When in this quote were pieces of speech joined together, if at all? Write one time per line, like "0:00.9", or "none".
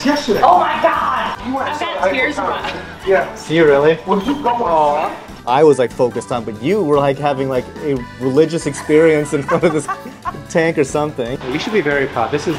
0:01.4
0:05.3
0:11.4